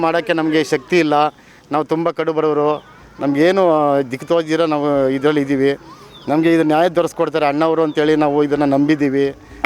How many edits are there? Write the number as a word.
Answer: zero